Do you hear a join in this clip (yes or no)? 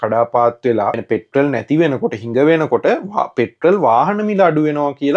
yes